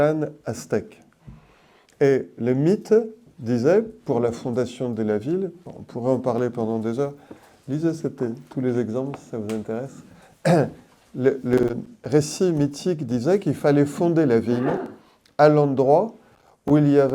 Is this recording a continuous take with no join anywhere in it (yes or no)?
yes